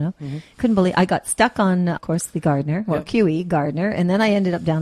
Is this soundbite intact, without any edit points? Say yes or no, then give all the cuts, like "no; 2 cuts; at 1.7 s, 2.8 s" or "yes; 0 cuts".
no; 1 cut; at 2.0 s